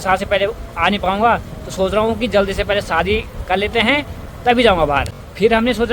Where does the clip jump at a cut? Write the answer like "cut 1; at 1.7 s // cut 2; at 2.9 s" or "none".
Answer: none